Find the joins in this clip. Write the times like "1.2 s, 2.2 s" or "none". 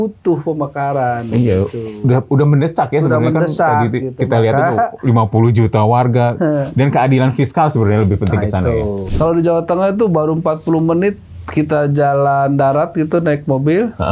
9.0 s